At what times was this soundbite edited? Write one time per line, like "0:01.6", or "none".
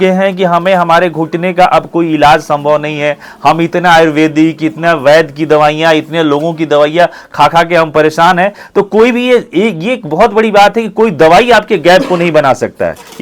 none